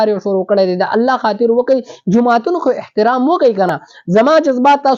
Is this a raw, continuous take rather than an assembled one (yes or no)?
yes